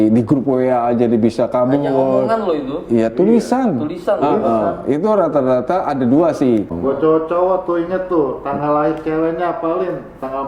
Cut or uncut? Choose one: cut